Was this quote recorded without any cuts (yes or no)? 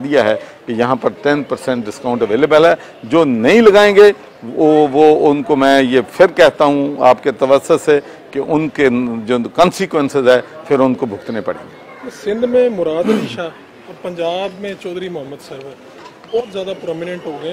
yes